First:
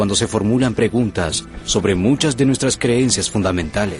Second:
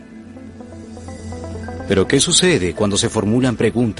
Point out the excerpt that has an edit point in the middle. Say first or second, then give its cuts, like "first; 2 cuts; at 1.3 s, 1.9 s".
second; 1 cut; at 1.9 s